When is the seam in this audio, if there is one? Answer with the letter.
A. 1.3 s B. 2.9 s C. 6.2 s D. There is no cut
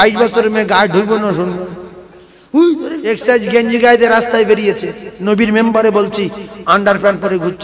B